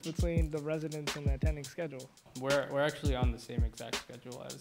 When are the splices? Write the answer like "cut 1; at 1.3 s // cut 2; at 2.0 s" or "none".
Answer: cut 1; at 2.3 s

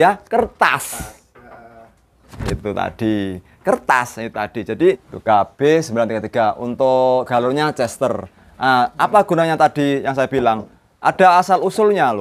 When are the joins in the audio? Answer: cut 1; at 5.1 s

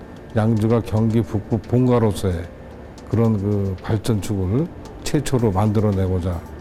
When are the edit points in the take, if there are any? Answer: none

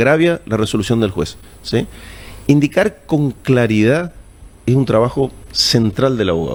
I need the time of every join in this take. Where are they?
none

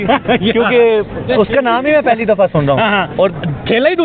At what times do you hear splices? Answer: none

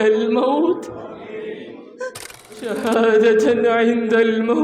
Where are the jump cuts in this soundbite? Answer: cut 1; at 2.7 s

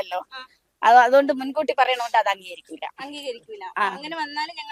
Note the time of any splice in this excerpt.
none

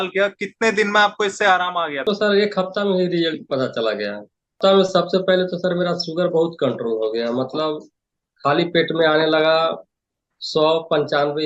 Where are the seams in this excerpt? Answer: cut 1; at 2.0 s // cut 2; at 4.6 s

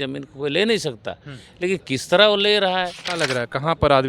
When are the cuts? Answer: cut 1; at 3.0 s

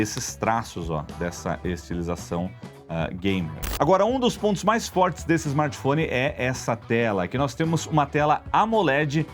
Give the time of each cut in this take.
cut 1; at 3.6 s

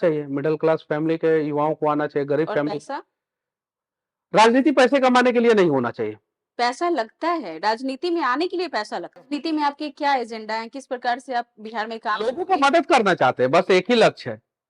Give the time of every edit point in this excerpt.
cut 1; at 9.3 s

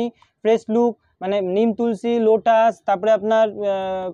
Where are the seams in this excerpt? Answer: none

